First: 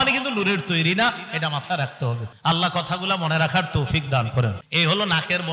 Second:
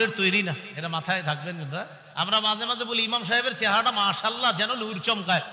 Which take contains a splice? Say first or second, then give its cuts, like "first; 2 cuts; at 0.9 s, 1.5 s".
first; 2 cuts; at 2.3 s, 4.6 s